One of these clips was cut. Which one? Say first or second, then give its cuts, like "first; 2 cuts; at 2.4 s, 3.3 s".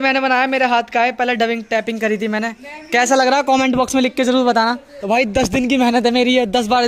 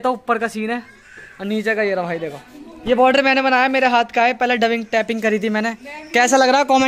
first; 1 cut; at 4.9 s